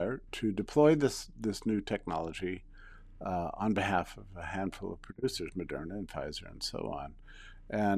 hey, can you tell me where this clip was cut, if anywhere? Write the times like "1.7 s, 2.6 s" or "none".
none

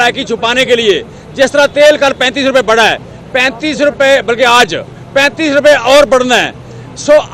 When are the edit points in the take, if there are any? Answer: none

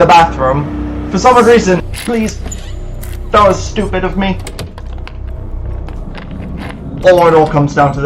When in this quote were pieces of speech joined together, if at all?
1.9 s

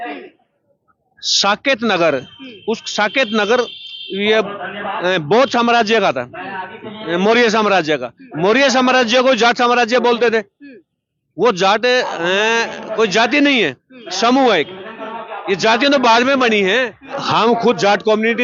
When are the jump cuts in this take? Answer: 17.2 s

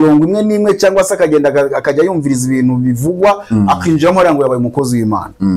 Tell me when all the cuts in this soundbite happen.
none

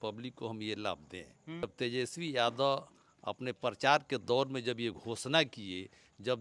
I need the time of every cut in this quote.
1.6 s

